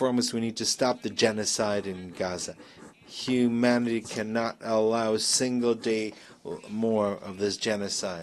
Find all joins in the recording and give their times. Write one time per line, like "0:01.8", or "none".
none

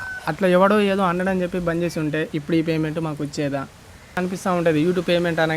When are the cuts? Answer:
0:04.2

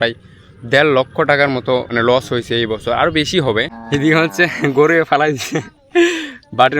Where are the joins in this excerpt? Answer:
0:01.9
0:03.7

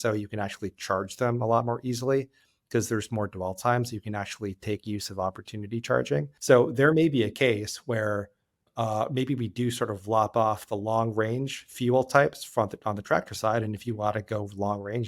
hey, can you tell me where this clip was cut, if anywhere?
0:06.3
0:08.7

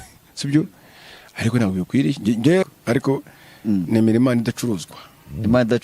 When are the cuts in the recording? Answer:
0:02.6

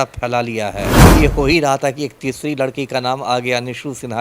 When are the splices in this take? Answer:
0:01.0

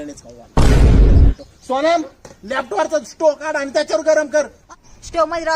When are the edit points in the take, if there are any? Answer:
0:04.6

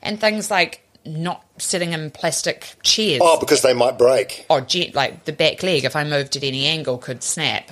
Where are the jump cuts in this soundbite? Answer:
0:00.9
0:02.7

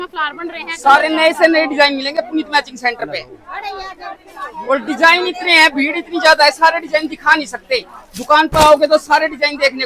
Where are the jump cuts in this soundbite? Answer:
none

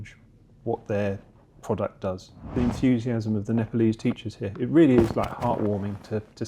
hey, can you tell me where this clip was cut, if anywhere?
0:02.5

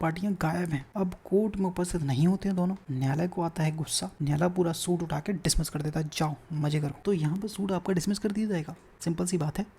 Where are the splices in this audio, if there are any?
0:00.9
0:02.9
0:04.0
0:07.0
0:08.8

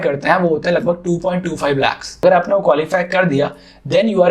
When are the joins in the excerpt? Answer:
0:02.2

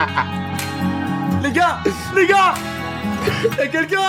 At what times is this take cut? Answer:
none

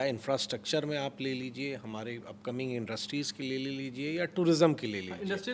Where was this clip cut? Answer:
none

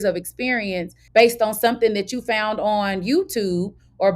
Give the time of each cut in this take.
0:00.9

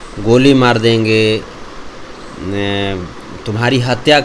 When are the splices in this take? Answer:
none

